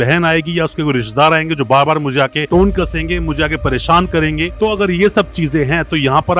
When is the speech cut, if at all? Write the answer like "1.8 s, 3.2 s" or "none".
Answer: none